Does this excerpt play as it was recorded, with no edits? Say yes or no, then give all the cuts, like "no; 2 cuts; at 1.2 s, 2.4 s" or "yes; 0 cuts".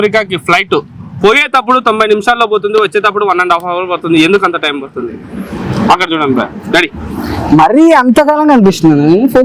yes; 0 cuts